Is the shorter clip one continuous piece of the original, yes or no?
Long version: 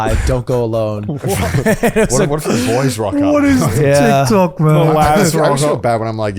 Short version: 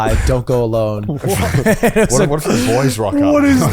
yes